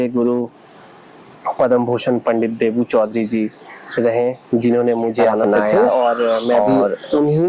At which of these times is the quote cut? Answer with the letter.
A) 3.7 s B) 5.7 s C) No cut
B